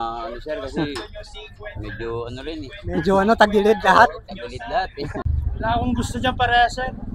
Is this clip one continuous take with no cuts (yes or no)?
no